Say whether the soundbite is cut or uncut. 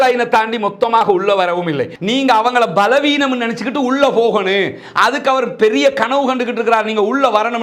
cut